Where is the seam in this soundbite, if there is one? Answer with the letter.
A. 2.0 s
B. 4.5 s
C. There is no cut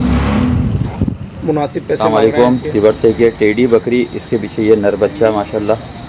A